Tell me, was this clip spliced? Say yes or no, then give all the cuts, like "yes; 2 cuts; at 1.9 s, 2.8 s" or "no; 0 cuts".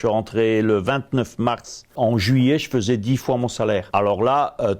yes; 2 cuts; at 1.9 s, 3.9 s